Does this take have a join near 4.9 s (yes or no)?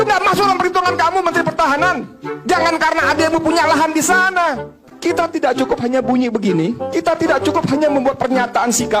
yes